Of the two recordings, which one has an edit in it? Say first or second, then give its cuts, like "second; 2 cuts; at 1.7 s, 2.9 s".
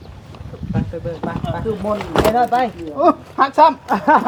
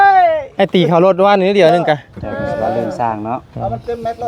second; 1 cut; at 2.6 s